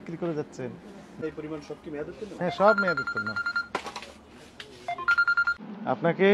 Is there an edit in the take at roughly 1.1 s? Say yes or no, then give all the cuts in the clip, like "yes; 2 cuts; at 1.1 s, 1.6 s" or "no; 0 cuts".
yes; 2 cuts; at 1.1 s, 5.6 s